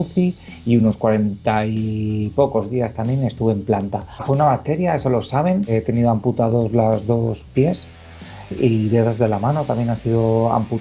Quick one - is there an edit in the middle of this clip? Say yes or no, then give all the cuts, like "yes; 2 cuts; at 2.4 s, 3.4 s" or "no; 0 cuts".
yes; 1 cut; at 5.6 s